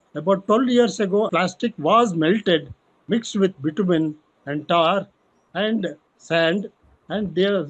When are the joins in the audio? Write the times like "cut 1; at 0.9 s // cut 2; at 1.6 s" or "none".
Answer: cut 1; at 1.3 s